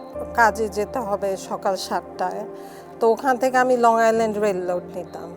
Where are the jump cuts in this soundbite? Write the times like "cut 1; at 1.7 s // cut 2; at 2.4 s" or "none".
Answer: none